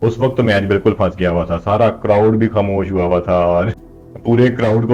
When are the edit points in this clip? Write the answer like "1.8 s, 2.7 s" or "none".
none

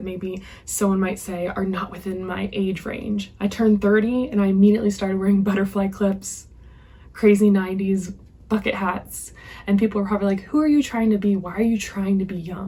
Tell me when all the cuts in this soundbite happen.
none

